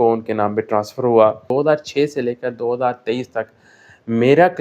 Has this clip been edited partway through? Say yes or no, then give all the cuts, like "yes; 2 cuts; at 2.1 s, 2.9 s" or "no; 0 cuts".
yes; 1 cut; at 1.4 s